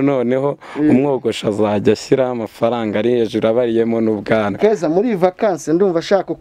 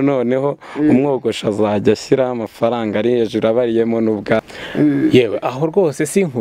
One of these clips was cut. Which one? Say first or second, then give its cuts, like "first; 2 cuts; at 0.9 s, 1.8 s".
second; 1 cut; at 4.5 s